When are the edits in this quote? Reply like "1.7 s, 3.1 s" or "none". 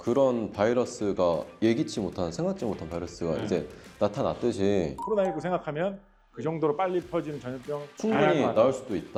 none